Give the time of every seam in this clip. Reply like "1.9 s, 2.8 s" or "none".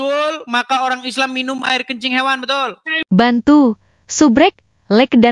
3.0 s